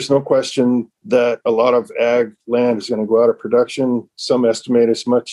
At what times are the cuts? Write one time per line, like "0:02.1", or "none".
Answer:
0:00.9